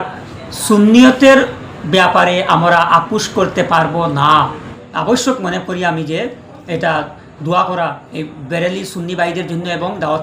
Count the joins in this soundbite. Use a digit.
1